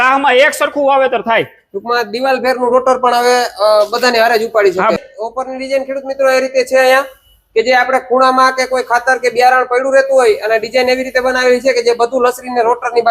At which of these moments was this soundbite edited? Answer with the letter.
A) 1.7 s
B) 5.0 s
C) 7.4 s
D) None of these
B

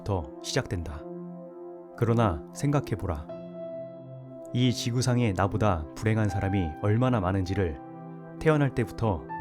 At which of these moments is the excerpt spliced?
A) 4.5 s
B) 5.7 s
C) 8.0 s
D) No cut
A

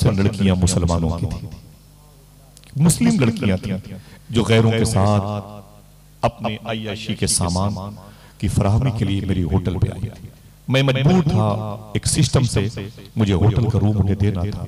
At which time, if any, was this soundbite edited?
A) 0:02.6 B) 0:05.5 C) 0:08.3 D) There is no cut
D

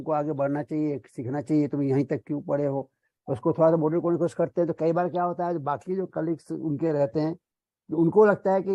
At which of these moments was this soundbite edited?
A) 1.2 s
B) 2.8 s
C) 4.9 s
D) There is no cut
D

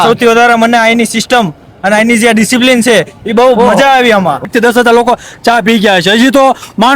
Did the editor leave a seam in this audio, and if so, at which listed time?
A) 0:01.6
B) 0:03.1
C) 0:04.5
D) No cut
C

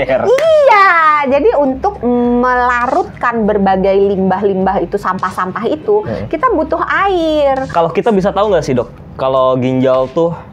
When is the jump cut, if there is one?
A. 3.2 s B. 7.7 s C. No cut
B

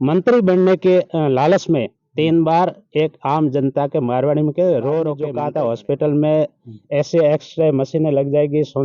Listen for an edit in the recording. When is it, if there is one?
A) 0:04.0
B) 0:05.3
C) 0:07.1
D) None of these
B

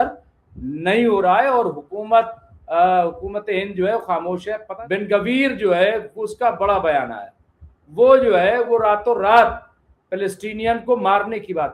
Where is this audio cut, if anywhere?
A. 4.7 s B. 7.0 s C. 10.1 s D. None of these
A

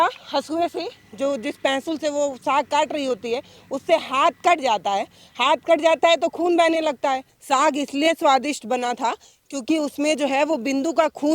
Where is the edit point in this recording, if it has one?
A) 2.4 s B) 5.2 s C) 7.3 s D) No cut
C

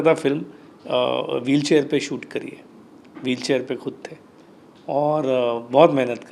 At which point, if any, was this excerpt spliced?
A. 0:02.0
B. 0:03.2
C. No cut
C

